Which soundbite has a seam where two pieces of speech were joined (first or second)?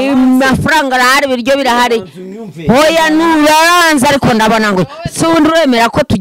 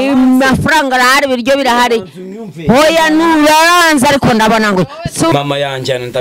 second